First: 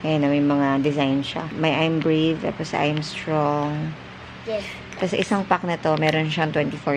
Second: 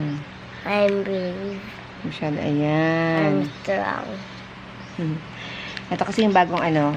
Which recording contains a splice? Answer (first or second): first